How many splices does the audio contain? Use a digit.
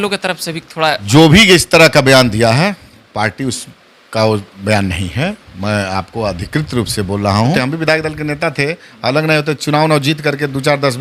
2